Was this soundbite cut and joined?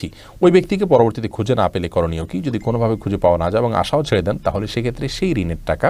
no; 0 cuts

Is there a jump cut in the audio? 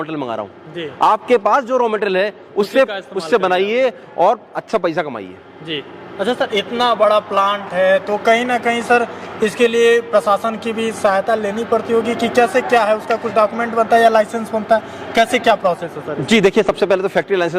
no; 0 cuts

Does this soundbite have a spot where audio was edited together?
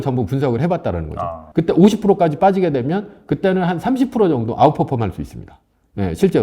yes; 1 cut; at 1.3 s

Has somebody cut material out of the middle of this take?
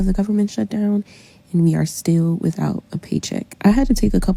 no; 0 cuts

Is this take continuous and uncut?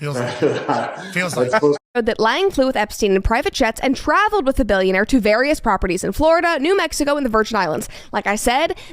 no; 1 cut; at 1.8 s

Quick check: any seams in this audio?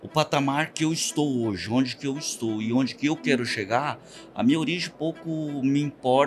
no; 0 cuts

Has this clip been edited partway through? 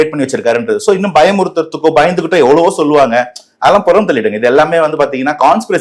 no; 0 cuts

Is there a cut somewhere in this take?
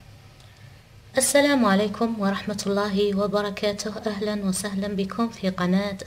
no; 0 cuts

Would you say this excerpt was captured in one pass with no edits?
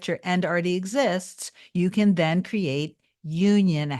yes; 0 cuts

